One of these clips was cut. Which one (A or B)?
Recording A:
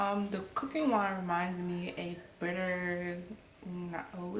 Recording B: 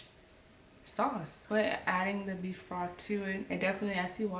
B